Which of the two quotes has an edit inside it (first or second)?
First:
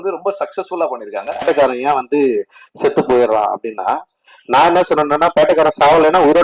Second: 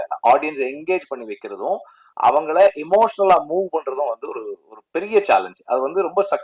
first